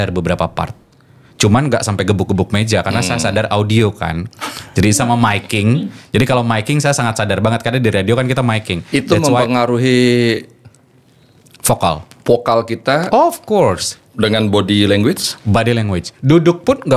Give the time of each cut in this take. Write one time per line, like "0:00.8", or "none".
none